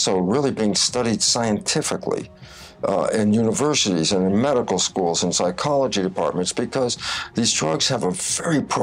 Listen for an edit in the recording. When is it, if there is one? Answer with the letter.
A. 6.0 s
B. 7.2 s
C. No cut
C